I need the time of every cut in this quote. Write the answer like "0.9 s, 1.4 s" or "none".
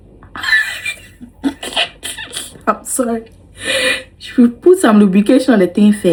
none